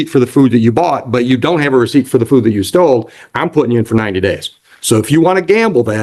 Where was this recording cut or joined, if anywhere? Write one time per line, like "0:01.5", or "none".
none